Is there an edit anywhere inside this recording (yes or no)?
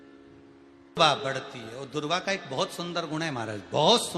yes